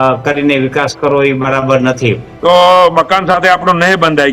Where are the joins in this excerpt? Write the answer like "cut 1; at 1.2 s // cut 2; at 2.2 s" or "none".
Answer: cut 1; at 2.3 s